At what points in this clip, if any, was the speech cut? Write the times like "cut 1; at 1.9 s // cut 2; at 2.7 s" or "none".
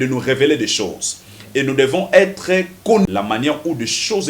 cut 1; at 3.1 s